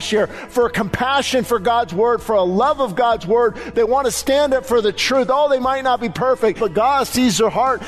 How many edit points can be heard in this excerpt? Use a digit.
1